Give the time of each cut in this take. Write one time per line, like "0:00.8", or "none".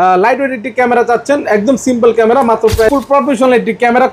0:02.9